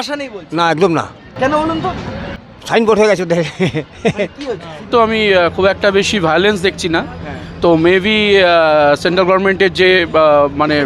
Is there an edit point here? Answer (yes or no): yes